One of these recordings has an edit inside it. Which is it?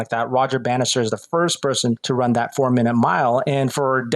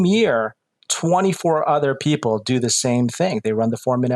first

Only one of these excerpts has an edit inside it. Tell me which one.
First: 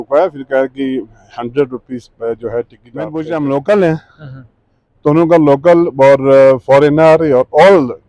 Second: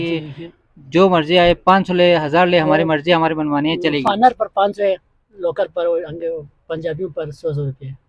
first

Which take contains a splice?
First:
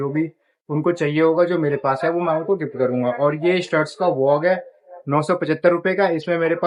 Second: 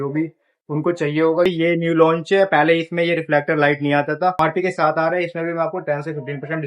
second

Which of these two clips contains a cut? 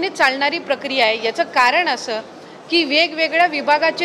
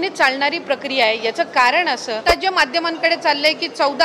second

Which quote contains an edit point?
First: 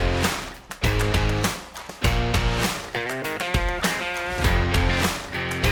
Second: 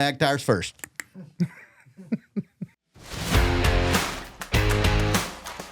second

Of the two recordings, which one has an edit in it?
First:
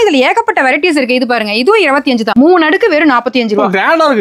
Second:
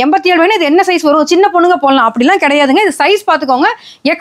first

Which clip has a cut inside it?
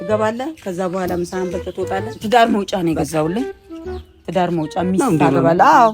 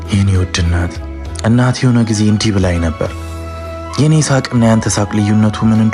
first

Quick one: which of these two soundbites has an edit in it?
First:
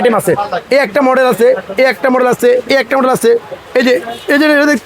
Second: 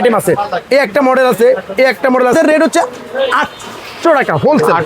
second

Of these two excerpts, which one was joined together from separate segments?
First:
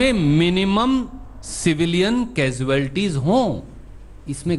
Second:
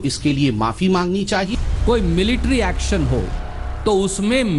second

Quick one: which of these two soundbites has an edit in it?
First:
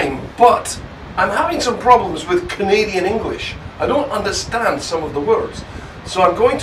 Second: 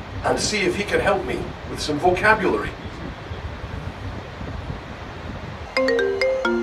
second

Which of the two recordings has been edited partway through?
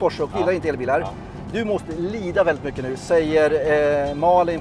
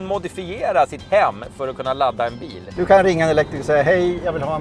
second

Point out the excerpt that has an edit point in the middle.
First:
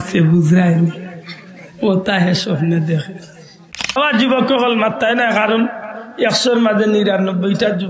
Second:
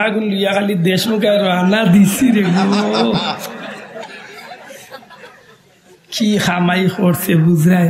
first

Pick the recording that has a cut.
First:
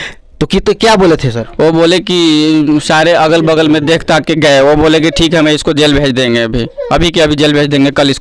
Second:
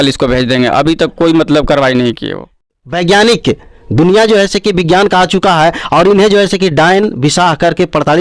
second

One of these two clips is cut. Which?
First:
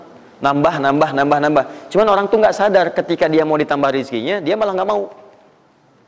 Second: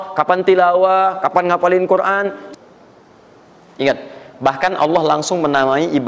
second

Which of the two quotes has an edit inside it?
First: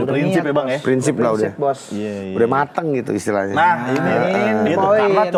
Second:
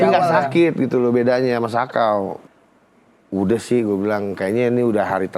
second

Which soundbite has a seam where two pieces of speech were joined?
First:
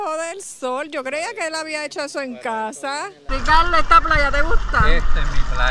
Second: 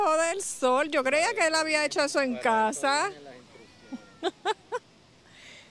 first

